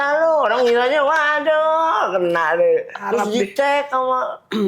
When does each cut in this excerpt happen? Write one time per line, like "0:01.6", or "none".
0:03.1